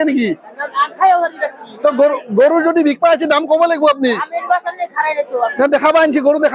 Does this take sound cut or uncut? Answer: uncut